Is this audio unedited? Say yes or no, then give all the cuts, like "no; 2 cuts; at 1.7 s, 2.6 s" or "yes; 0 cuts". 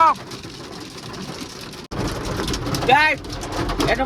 no; 1 cut; at 1.9 s